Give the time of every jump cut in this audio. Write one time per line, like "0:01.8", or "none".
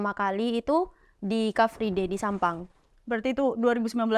none